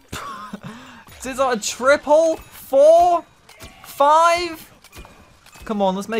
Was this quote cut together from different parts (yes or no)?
no